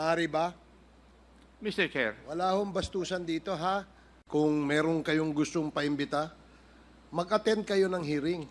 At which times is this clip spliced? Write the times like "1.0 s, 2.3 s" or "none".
4.1 s

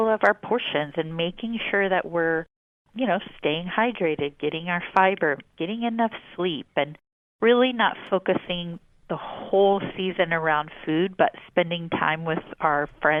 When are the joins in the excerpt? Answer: none

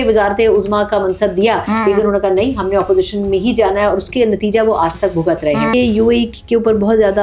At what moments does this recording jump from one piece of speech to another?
5.7 s

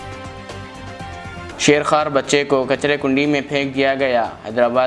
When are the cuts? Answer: 1.5 s

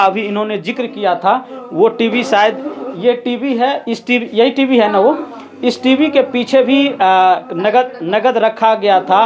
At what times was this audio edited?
none

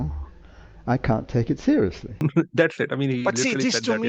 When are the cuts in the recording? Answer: 2.1 s

